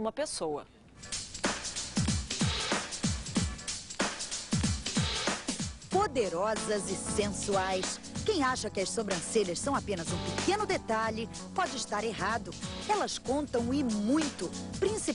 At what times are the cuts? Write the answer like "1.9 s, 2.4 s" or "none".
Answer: none